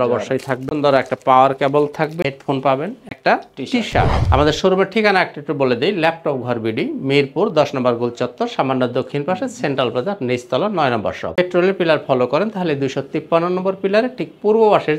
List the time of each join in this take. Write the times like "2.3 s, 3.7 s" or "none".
4.2 s, 11.4 s